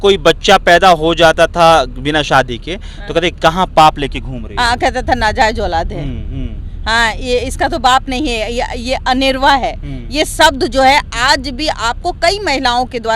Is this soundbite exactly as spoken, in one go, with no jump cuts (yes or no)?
yes